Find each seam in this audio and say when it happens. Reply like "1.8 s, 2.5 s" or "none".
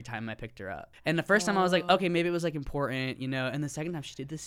0.9 s